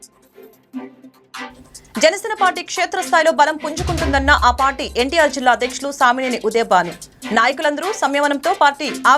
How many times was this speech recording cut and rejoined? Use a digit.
1